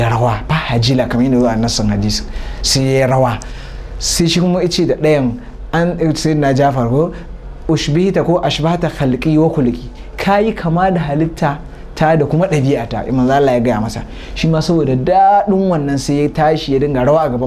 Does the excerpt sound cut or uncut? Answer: uncut